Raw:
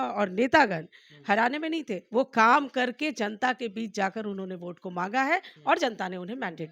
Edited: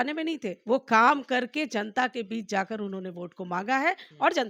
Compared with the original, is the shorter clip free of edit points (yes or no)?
yes